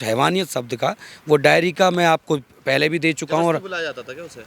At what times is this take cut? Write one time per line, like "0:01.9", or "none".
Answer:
none